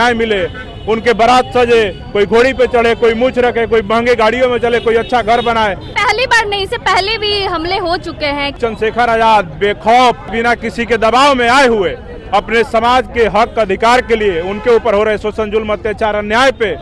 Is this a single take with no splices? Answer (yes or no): no